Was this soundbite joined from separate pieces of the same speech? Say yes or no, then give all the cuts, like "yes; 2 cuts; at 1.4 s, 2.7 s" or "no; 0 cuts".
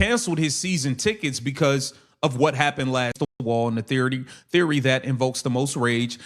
yes; 1 cut; at 3.4 s